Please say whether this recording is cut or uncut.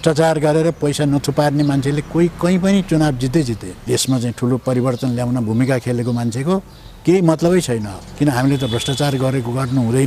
cut